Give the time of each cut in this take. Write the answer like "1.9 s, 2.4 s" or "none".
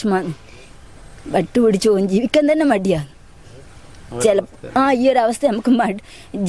none